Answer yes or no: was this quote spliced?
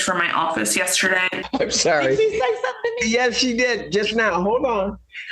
yes